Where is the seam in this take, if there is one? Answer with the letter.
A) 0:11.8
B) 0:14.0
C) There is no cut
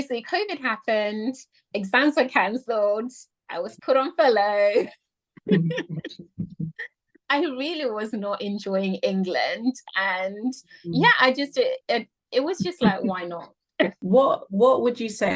B